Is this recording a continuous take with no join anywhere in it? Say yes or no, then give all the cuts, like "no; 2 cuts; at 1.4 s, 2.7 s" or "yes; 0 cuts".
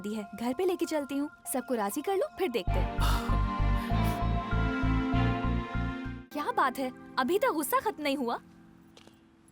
no; 1 cut; at 6.0 s